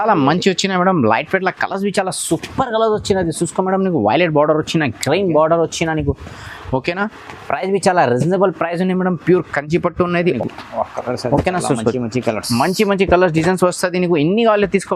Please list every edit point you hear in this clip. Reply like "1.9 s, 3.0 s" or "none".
10.4 s